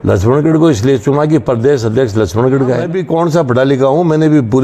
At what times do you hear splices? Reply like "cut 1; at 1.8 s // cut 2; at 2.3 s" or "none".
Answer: cut 1; at 2.9 s